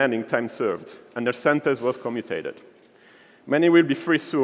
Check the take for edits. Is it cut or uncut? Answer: cut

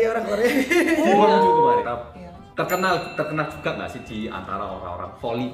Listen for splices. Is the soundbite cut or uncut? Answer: cut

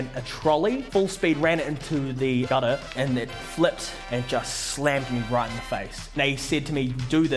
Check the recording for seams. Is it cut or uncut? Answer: cut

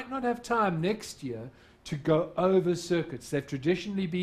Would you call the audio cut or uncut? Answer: cut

